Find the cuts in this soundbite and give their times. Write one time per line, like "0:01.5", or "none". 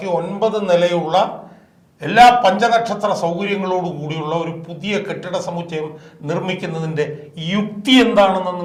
none